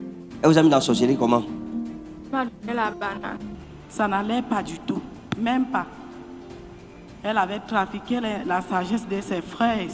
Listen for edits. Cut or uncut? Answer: cut